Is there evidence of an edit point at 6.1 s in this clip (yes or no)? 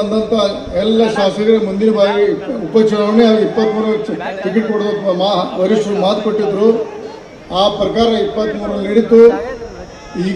no